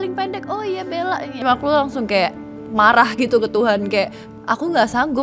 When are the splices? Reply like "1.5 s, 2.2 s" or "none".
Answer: 1.4 s, 4.2 s